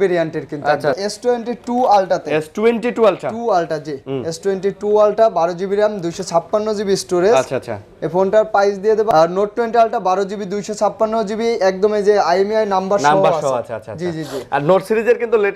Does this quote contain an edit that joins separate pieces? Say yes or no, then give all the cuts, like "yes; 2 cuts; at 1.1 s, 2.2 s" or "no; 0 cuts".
yes; 2 cuts; at 1.1 s, 9.1 s